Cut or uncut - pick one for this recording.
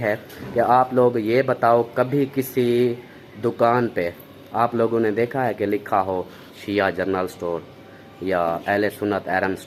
uncut